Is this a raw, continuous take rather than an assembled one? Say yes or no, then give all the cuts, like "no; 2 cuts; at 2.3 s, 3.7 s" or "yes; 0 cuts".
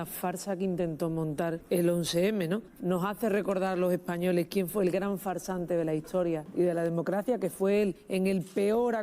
no; 3 cuts; at 1.6 s, 6.5 s, 8.0 s